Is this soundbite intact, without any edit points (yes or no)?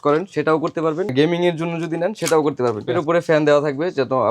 no